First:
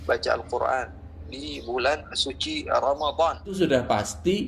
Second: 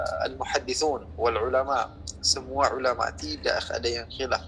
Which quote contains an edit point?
first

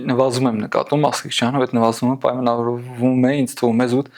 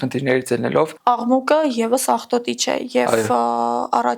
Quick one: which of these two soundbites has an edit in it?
second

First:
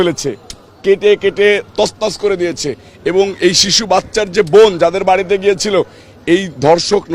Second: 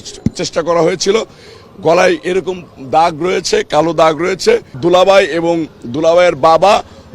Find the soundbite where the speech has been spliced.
second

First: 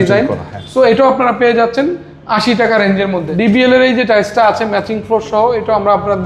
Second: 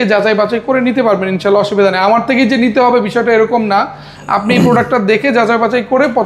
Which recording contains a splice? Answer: first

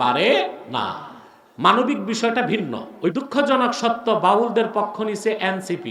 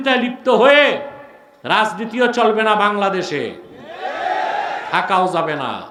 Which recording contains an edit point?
first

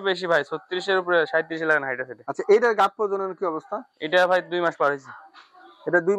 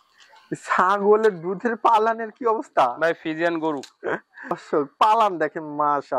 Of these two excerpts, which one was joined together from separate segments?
second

